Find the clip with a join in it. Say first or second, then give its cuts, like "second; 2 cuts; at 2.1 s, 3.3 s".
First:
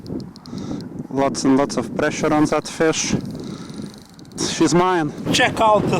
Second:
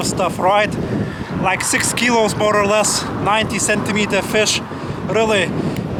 first; 2 cuts; at 4.4 s, 5.2 s